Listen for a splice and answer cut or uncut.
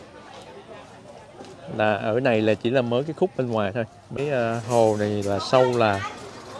cut